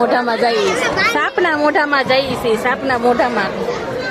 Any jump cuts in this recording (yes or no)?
no